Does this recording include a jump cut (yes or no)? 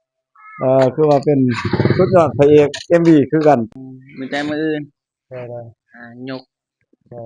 yes